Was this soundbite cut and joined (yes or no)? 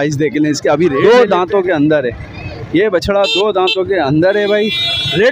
yes